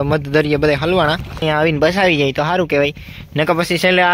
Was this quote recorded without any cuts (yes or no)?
no